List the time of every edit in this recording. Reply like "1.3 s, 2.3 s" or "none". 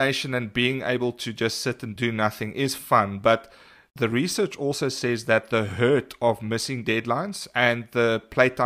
1.9 s